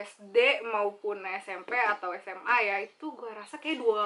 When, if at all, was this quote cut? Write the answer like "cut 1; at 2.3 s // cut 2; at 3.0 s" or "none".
none